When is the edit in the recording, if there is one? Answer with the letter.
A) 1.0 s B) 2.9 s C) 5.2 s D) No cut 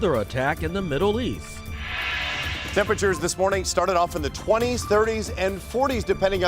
D